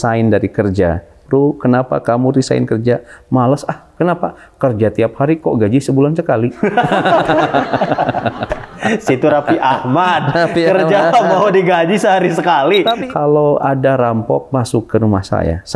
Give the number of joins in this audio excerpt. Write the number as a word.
one